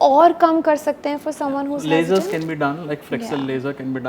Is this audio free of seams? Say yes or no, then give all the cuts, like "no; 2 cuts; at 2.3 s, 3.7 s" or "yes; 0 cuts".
yes; 0 cuts